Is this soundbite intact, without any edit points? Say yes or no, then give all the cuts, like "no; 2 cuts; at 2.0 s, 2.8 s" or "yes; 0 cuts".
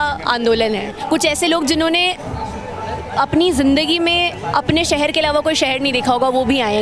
no; 1 cut; at 1.0 s